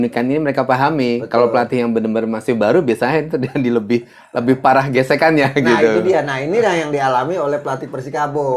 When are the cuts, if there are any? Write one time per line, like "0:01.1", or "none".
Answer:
none